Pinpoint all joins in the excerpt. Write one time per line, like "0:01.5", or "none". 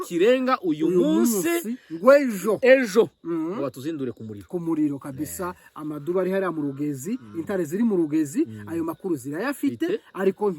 none